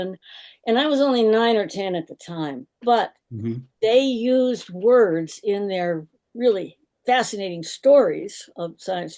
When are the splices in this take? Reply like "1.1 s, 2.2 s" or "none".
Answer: none